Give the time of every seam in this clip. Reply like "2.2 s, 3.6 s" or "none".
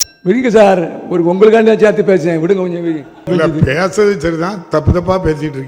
3.3 s